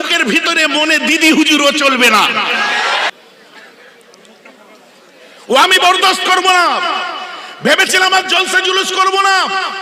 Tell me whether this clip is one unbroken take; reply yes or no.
no